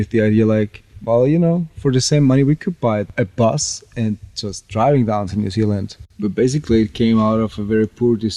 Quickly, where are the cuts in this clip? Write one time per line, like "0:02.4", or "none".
0:03.1
0:06.1